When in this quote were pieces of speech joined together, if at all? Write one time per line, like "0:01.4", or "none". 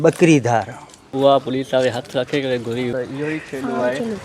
0:01.1
0:02.9